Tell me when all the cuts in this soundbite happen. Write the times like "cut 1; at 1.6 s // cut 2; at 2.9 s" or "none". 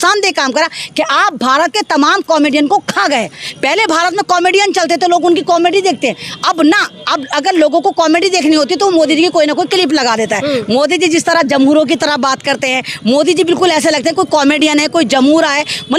none